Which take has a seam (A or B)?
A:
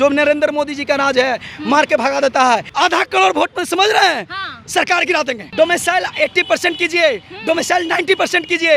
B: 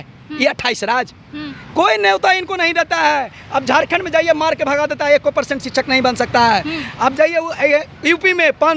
A